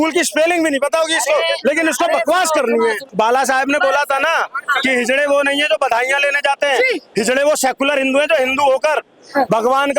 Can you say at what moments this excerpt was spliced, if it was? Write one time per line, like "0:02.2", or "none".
0:03.1